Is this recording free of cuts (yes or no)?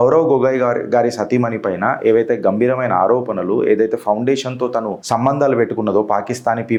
yes